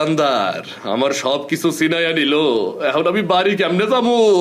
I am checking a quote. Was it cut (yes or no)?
no